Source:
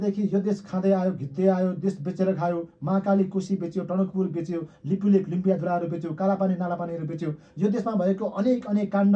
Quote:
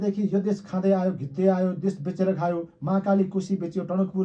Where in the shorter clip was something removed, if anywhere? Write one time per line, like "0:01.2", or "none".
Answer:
none

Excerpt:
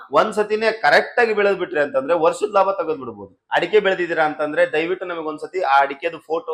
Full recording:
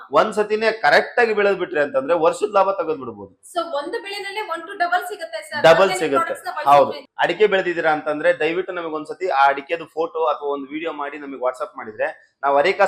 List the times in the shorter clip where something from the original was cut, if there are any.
0:03.4

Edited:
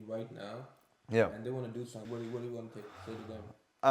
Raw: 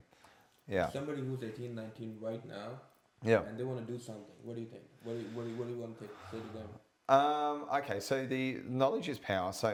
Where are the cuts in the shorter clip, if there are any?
0:02.1

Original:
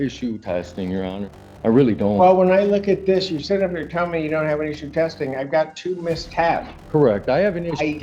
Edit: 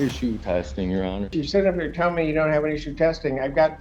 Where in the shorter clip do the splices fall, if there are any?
0:01.4

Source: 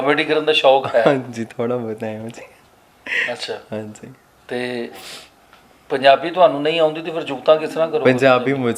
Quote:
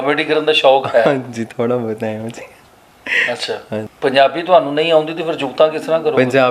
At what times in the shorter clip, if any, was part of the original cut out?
0:03.9

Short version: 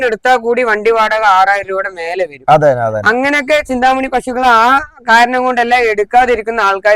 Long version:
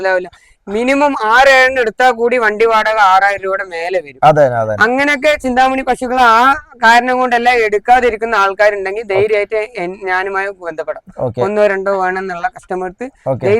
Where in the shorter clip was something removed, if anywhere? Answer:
none

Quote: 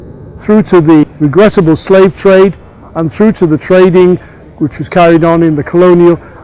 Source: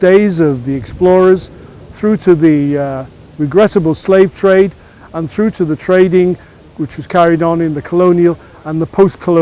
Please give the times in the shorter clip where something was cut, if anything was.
0:01.1

